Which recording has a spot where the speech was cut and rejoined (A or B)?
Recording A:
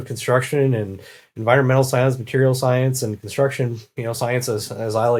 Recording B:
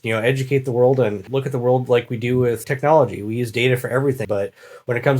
B